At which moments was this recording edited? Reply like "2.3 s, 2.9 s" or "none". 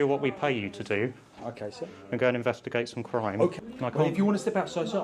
3.6 s